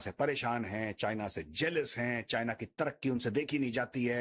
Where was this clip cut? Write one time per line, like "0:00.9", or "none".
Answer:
none